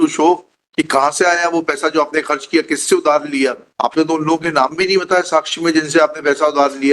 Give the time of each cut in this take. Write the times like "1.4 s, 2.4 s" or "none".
3.6 s